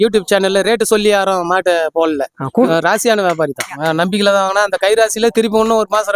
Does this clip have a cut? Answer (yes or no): yes